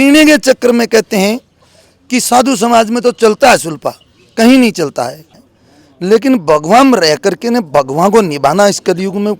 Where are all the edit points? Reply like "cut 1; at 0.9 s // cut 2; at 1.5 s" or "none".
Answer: cut 1; at 5.2 s

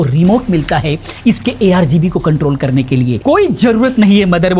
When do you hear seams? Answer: cut 1; at 3.2 s

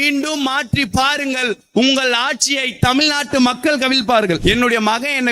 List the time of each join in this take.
cut 1; at 4.4 s

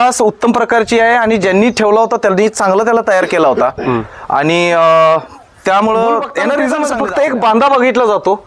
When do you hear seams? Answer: cut 1; at 6.7 s

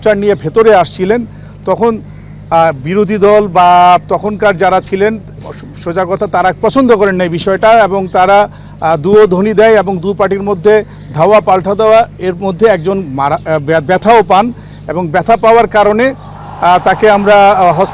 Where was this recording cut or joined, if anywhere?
none

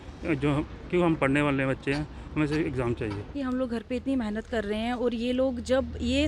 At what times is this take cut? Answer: cut 1; at 3.3 s

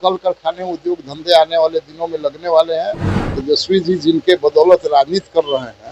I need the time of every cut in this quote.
cut 1; at 3.1 s

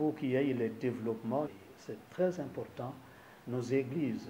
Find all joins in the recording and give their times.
cut 1; at 1.5 s

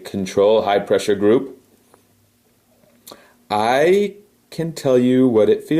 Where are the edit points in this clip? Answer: cut 1; at 1.9 s

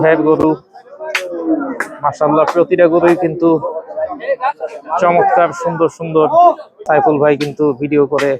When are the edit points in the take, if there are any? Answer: cut 1; at 6.8 s

